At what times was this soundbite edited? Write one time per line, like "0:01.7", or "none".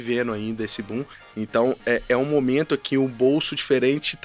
0:01.2